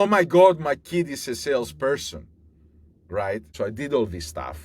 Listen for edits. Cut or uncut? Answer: cut